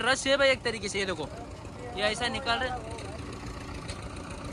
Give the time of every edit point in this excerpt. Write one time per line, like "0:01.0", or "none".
none